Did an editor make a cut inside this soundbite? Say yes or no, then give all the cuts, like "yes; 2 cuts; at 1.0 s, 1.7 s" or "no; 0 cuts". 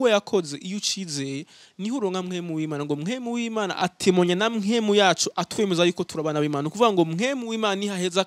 no; 0 cuts